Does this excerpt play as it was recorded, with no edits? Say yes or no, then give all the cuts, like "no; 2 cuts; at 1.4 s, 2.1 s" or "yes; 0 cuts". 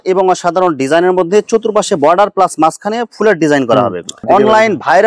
no; 1 cut; at 4.1 s